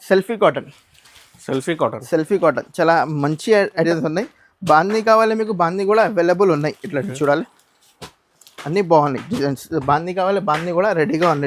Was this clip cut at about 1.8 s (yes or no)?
no